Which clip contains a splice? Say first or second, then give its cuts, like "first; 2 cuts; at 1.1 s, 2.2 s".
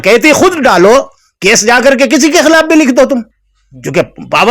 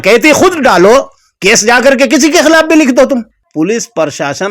second; 1 cut; at 3.4 s